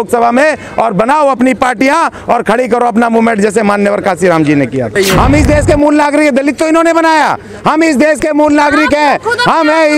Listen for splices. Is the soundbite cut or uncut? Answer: cut